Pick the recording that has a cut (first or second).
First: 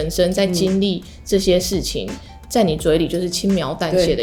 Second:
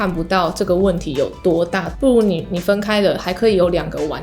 second